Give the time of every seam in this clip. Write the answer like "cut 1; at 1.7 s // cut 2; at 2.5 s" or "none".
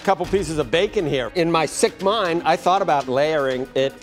cut 1; at 1.3 s // cut 2; at 3.0 s